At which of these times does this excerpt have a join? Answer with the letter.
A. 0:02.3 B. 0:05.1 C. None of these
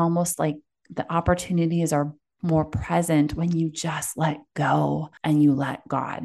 B